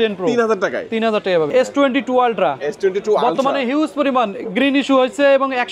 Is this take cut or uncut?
cut